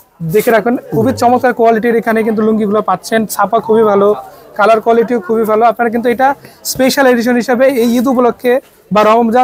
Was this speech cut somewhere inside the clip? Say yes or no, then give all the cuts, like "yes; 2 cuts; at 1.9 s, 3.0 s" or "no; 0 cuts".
no; 0 cuts